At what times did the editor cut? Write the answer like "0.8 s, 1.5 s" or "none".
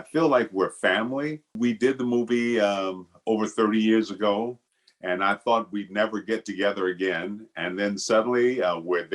1.5 s